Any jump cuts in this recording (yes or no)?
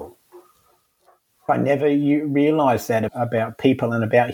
yes